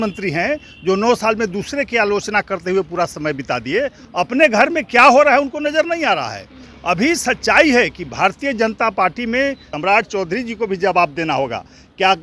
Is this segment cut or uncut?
cut